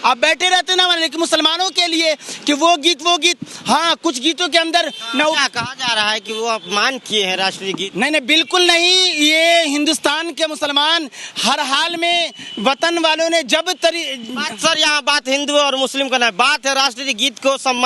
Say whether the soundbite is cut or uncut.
uncut